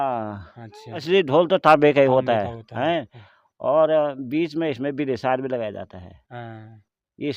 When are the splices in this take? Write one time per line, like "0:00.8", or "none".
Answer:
0:01.0

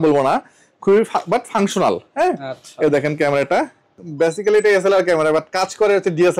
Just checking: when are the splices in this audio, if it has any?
0:04.0

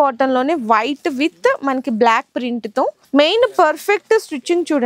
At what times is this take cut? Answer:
0:03.0

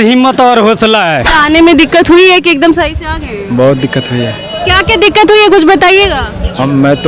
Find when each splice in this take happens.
0:01.2

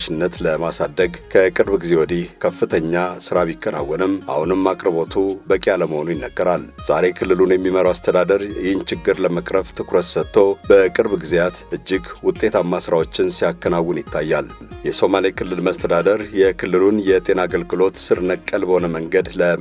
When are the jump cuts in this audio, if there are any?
0:14.7

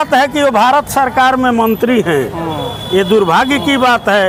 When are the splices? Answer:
none

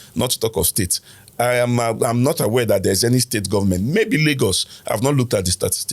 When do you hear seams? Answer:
none

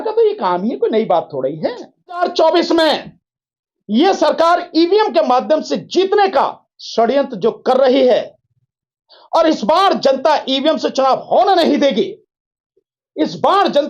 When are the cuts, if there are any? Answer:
0:02.2

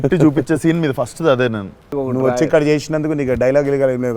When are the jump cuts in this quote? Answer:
0:02.0

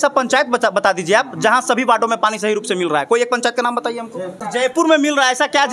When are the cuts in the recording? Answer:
0:04.4

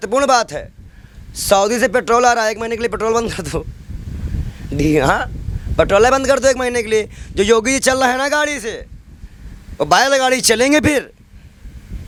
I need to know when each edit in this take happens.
none

